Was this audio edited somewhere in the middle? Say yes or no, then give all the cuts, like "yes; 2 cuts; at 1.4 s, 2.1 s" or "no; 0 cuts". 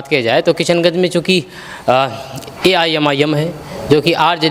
no; 0 cuts